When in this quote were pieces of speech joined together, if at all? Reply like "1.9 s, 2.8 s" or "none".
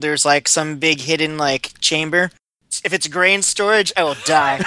2.5 s